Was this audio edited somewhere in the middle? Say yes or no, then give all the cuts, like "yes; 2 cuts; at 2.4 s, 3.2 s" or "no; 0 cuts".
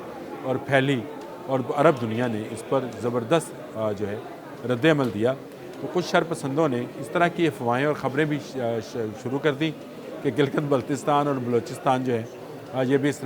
no; 0 cuts